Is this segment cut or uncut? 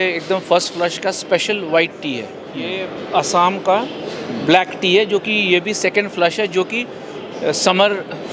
cut